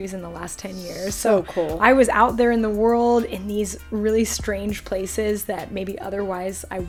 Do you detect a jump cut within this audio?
no; 0 cuts

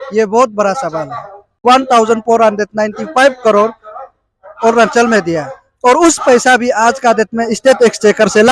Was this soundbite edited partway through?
yes; 1 cut; at 1.4 s

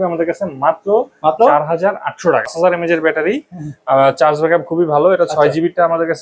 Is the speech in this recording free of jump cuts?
no; 1 cut; at 2.5 s

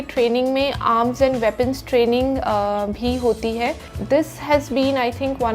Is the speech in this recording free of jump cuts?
no; 1 cut; at 3.9 s

